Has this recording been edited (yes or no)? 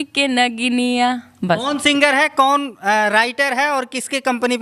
no